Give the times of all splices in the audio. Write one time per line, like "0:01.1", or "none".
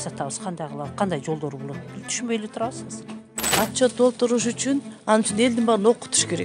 0:03.4